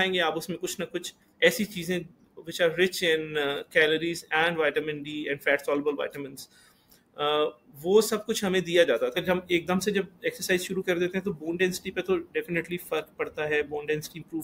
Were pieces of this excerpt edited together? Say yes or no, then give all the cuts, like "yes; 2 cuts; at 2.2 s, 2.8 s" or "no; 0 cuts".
yes; 1 cut; at 9.2 s